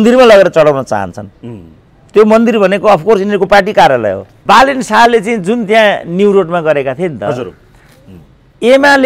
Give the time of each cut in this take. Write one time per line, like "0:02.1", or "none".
0:04.3